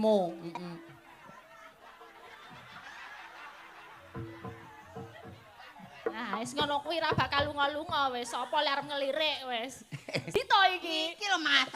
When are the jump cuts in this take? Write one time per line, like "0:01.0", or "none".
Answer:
0:10.3